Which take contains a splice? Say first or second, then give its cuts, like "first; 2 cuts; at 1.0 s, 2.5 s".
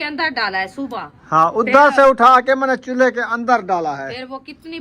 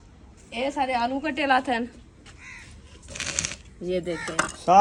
first; 1 cut; at 1.1 s